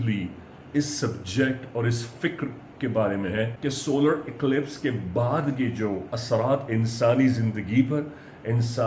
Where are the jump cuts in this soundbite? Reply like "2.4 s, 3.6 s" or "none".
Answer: 3.5 s